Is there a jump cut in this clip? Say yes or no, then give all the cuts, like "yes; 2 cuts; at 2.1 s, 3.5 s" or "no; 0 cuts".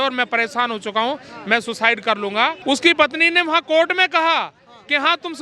yes; 1 cut; at 2.6 s